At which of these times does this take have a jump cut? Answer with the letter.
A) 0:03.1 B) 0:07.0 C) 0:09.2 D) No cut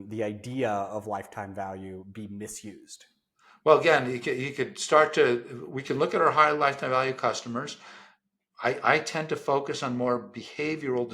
D